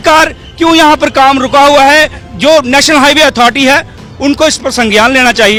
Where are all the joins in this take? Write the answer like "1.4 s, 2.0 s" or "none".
none